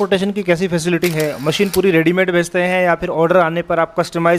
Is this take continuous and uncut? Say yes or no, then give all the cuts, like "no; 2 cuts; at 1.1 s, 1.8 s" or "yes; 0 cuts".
yes; 0 cuts